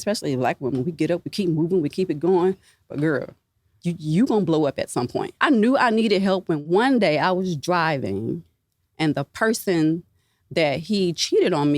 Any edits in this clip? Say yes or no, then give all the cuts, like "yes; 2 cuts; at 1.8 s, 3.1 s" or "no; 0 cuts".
yes; 3 cuts; at 3.7 s, 5.2 s, 6.6 s